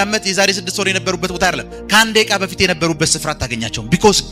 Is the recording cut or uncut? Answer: uncut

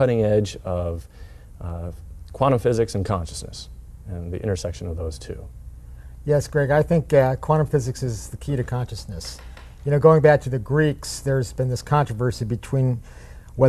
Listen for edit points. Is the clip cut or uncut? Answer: uncut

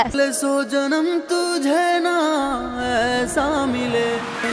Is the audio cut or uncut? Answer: uncut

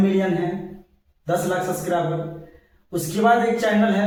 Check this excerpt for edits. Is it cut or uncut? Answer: uncut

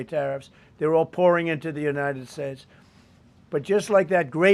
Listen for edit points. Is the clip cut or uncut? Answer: uncut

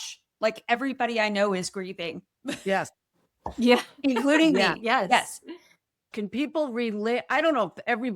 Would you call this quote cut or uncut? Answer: cut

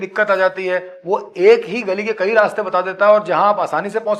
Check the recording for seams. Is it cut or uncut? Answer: uncut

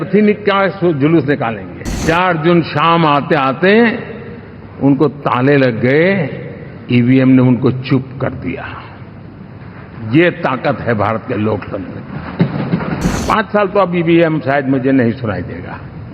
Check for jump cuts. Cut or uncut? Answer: cut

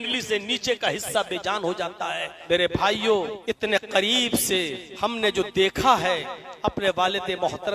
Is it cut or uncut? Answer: cut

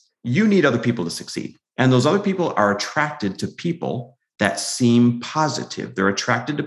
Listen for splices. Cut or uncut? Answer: uncut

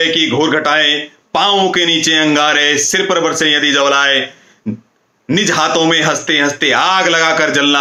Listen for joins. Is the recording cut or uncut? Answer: uncut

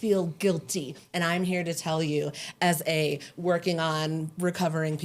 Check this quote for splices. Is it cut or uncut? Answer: cut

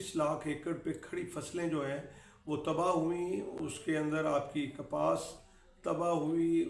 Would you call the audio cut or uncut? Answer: uncut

